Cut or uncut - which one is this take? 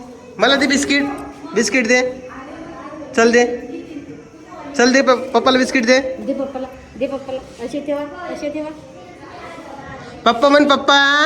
uncut